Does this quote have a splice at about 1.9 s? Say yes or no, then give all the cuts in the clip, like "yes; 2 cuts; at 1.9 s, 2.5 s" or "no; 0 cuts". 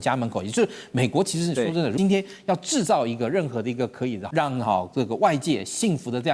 yes; 2 cuts; at 1.9 s, 4.2 s